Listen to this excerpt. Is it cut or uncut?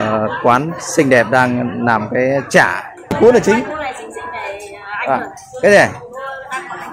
cut